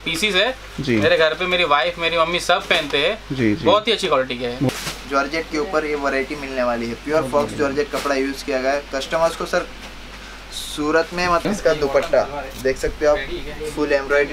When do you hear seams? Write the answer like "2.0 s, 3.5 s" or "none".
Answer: 4.7 s, 11.4 s